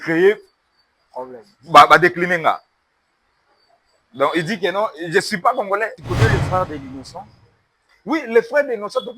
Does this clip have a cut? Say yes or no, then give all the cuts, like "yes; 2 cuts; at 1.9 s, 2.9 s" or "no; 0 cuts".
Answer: yes; 1 cut; at 6.0 s